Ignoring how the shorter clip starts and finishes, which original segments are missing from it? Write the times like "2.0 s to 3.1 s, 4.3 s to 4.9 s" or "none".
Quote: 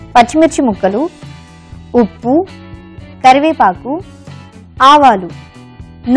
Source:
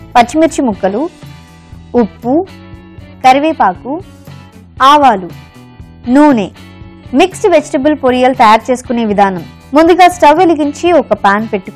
none